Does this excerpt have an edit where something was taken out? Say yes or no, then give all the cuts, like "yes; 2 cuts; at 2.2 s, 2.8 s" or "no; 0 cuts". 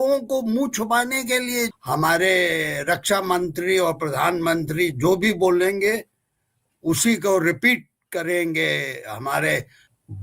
yes; 1 cut; at 1.7 s